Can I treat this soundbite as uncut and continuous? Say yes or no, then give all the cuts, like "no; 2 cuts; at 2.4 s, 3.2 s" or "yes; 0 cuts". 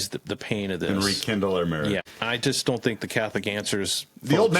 no; 1 cut; at 2.1 s